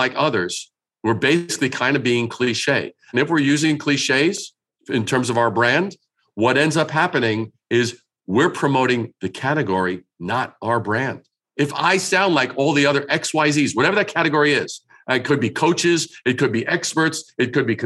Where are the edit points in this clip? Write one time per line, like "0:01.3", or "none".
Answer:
none